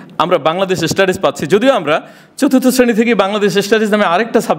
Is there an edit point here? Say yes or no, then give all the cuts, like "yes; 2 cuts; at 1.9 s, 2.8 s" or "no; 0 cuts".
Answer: no; 0 cuts